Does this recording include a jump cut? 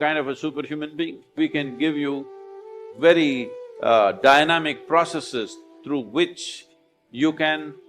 yes; 1 cut; at 1.3 s

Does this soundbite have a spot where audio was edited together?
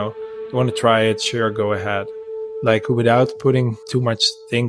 yes; 2 cuts; at 2.2 s, 3.8 s

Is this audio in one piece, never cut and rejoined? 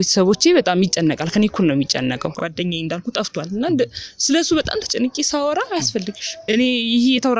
no; 2 cuts; at 2.4 s, 6.3 s

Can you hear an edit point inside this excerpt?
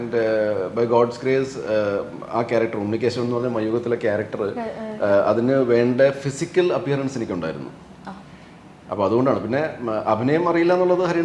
no; 0 cuts

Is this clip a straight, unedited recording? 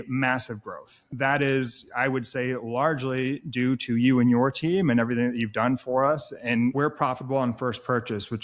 no; 2 cuts; at 1.1 s, 6.7 s

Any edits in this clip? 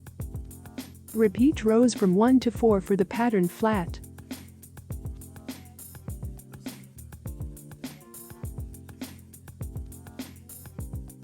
yes; 4 cuts; at 1.1 s, 3.9 s, 8.5 s, 10.1 s

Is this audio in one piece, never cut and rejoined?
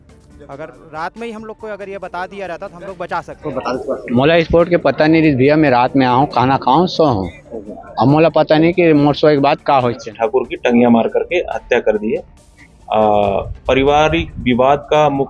no; 2 cuts; at 3.6 s, 10.0 s

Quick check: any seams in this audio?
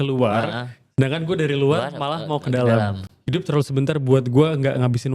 yes; 1 cut; at 3.1 s

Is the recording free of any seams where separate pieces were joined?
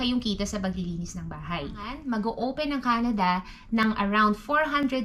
no; 1 cut; at 2.0 s

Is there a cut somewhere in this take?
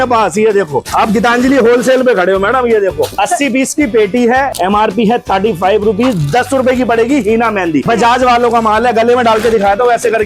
yes; 2 cuts; at 4.5 s, 7.9 s

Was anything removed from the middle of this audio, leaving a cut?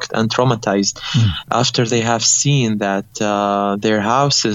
no; 0 cuts

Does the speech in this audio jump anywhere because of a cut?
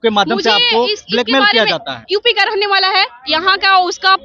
yes; 1 cut; at 2.0 s

